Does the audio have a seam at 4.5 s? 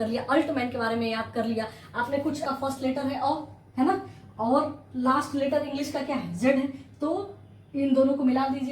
no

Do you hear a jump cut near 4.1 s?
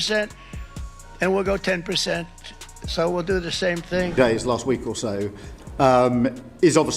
yes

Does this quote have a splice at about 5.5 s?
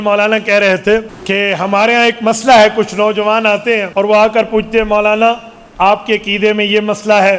no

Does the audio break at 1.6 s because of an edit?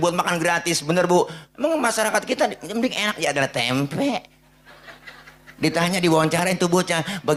no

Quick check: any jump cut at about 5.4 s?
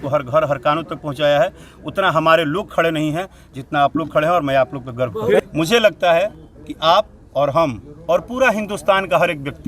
yes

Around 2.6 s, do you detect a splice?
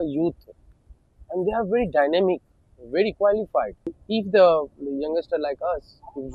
no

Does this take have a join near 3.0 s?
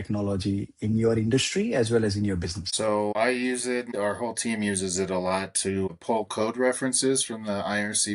yes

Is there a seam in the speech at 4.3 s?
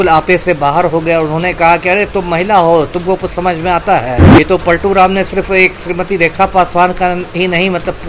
yes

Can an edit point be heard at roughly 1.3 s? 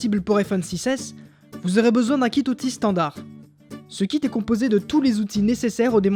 no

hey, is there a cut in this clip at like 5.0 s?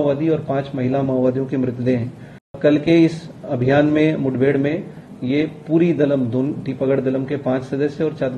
no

